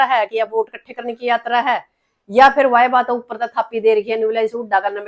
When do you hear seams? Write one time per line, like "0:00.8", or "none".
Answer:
none